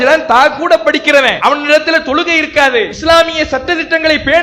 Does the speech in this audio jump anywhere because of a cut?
yes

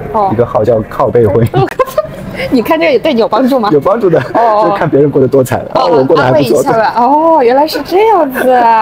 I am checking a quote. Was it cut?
no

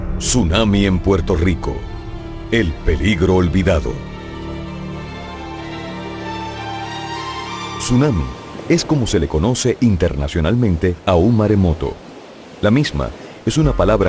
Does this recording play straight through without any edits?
yes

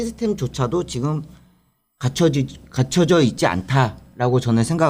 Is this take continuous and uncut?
yes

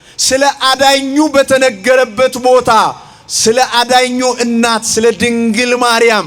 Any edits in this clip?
no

